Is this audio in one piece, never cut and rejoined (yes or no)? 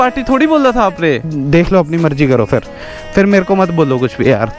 no